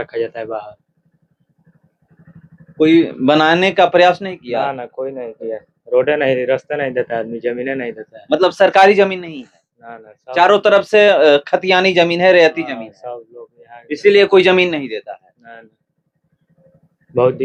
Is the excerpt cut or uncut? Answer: uncut